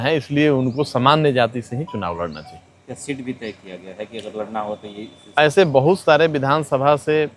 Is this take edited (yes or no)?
no